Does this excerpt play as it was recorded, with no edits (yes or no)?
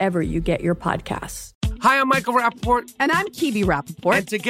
no